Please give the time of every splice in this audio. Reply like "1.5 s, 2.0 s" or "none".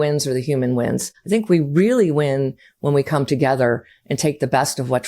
1.1 s